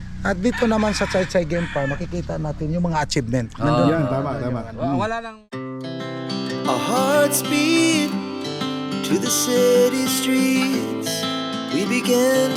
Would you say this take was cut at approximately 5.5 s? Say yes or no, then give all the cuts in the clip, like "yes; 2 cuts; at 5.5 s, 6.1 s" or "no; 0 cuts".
yes; 1 cut; at 5.5 s